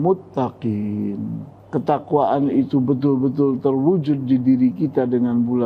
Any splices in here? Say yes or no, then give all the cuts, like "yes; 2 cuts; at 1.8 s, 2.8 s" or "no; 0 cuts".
yes; 1 cut; at 1.5 s